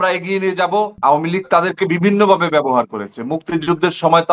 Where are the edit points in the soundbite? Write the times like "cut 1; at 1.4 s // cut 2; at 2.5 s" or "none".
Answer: cut 1; at 1.0 s